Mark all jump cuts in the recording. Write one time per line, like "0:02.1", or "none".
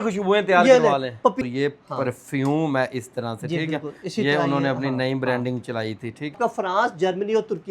0:01.5
0:06.4